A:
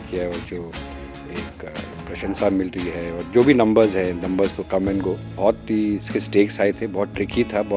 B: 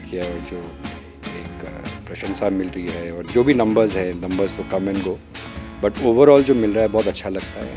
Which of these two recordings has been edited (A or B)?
A